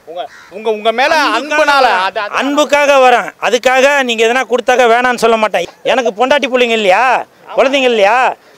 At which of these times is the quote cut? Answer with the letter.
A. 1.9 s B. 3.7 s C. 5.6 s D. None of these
C